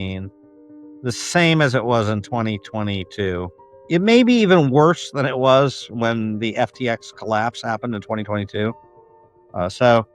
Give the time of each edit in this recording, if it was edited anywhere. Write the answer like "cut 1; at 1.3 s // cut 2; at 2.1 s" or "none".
cut 1; at 3.7 s